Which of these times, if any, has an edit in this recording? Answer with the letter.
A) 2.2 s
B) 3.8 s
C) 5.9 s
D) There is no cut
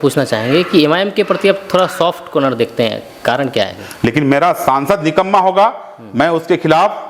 B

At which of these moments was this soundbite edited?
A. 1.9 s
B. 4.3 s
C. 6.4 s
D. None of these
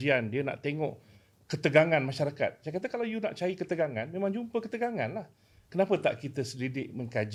D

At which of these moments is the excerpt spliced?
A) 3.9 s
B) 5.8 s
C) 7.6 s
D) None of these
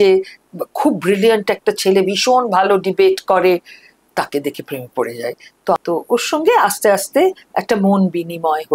B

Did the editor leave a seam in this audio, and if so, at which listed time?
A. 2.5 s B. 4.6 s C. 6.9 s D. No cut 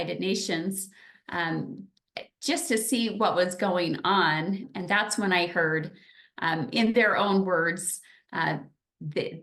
B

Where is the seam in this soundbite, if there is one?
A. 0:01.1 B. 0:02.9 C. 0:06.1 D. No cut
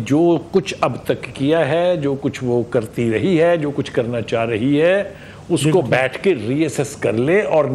D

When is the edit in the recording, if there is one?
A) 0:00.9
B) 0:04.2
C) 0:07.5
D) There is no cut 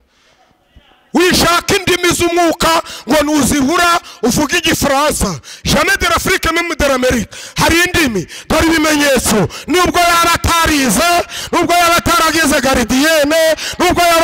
D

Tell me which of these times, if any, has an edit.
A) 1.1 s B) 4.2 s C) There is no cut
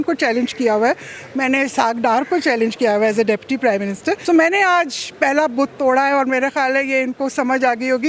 B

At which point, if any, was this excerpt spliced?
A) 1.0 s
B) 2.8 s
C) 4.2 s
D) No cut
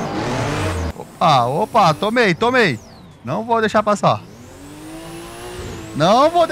A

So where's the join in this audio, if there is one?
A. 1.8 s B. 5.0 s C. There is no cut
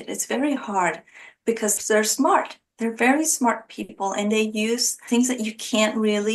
A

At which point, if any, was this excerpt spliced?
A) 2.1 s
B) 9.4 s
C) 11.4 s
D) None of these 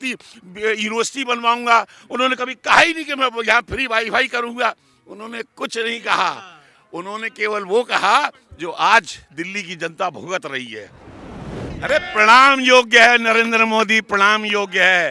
C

